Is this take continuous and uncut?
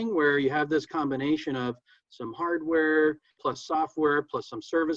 no; 1 cut; at 3.3 s

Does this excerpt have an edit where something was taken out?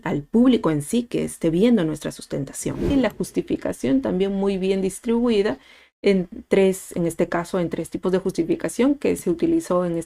yes; 1 cut; at 2.9 s

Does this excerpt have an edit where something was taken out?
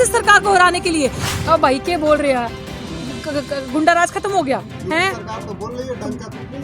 yes; 1 cut; at 1.3 s

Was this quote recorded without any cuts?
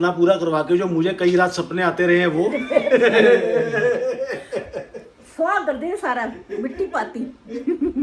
yes; 0 cuts

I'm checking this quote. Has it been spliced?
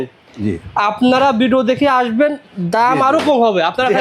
no; 0 cuts

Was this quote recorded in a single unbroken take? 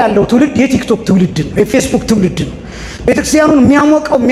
yes; 0 cuts

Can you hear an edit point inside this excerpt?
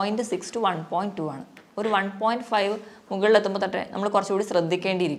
no; 0 cuts

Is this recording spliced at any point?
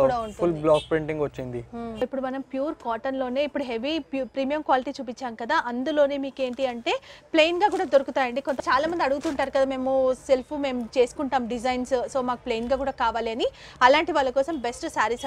yes; 2 cuts; at 2.0 s, 8.6 s

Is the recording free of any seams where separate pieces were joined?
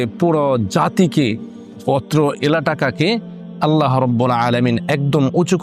yes; 0 cuts

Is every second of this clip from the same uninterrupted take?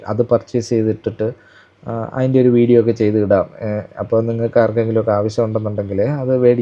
yes; 0 cuts

